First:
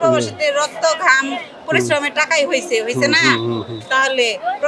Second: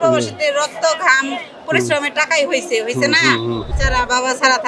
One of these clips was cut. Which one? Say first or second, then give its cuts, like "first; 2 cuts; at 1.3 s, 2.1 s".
second; 1 cut; at 3.7 s